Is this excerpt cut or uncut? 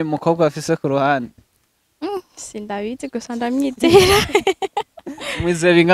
uncut